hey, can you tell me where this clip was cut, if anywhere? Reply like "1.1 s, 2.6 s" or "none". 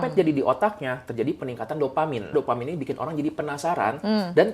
2.3 s